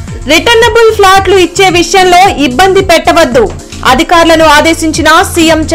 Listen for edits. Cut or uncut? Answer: uncut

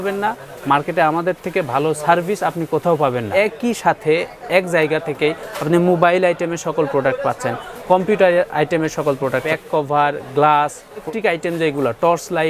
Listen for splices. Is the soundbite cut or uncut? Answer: cut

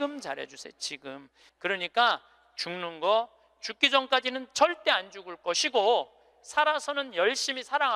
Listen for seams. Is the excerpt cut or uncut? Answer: uncut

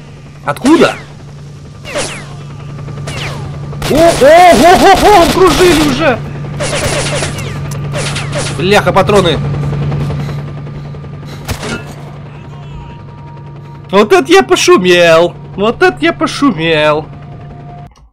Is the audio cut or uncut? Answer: uncut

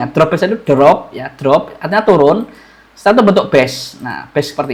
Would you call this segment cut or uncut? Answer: uncut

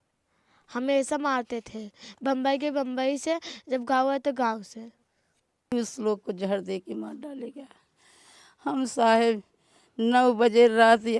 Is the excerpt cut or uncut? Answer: cut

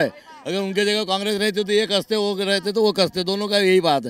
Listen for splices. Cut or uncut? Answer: uncut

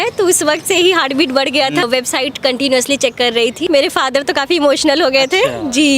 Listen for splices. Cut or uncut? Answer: cut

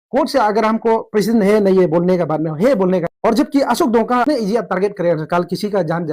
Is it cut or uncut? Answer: cut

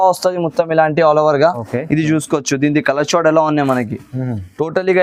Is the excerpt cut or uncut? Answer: uncut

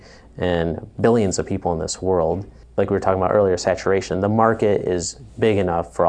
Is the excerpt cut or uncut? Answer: cut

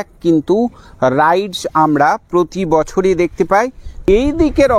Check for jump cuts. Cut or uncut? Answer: cut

